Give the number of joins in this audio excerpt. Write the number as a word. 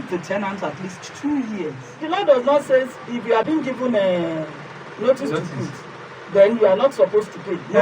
two